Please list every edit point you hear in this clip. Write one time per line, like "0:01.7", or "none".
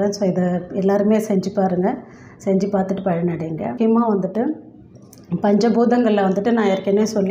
0:03.8